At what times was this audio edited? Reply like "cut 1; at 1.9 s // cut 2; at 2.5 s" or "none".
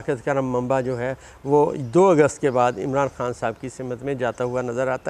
none

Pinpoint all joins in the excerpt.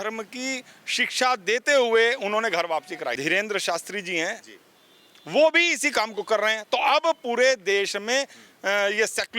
cut 1; at 3.2 s

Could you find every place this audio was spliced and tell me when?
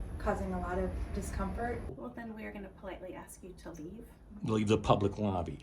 cut 1; at 1.8 s

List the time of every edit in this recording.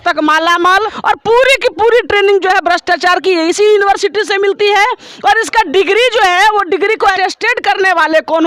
cut 1; at 0.9 s // cut 2; at 7.2 s

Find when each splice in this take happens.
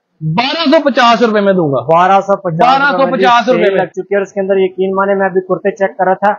none

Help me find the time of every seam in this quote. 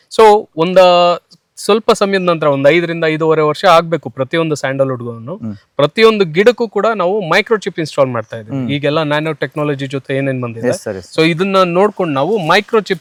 none

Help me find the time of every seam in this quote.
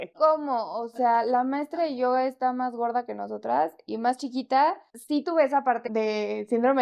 cut 1; at 4.9 s // cut 2; at 5.8 s

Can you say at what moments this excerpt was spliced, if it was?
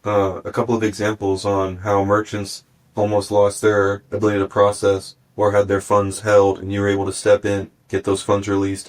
none

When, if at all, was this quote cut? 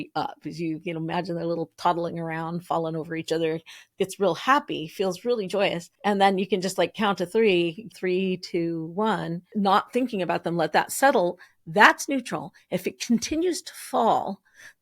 cut 1; at 5.9 s // cut 2; at 7.9 s // cut 3; at 9.4 s

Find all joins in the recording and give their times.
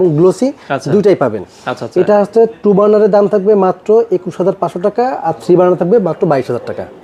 none

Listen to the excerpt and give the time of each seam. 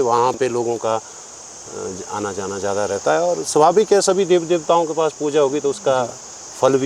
none

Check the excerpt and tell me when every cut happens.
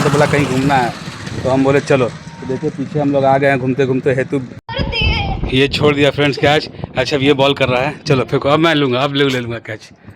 cut 1; at 4.6 s

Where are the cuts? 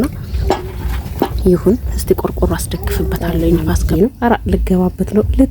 cut 1; at 3.8 s

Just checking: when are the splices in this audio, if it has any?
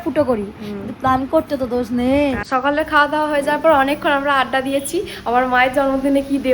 cut 1; at 2.4 s

